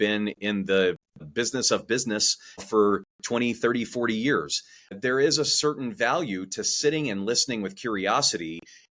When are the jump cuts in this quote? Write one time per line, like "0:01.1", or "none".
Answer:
0:01.2
0:02.6
0:04.9